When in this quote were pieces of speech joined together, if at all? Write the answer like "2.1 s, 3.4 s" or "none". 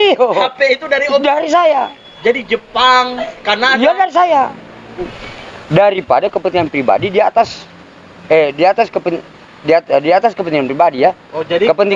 5.2 s

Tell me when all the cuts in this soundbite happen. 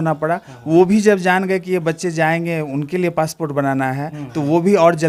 none

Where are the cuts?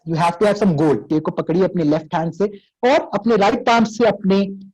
1.0 s

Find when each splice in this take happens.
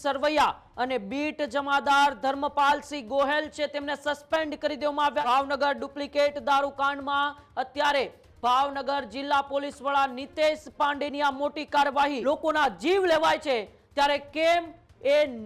5.2 s, 12.2 s

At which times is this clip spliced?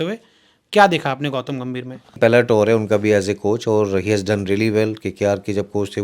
2.1 s

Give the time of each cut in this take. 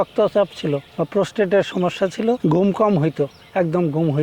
0.9 s, 2.4 s

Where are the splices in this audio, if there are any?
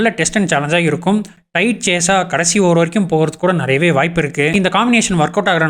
1.4 s, 4.5 s

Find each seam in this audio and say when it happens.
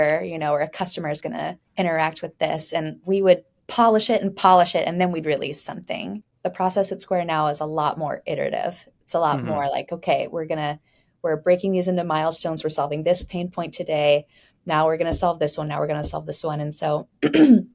6.2 s

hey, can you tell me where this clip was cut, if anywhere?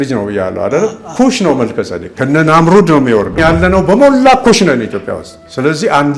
3.4 s

